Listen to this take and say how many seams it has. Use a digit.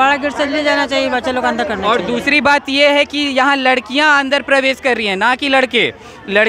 0